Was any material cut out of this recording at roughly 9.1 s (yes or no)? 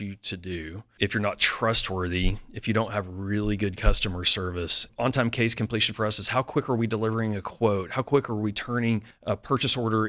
yes